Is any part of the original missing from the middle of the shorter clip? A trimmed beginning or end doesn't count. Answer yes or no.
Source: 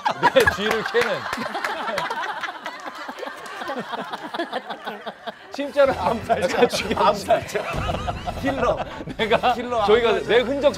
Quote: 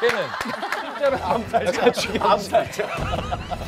yes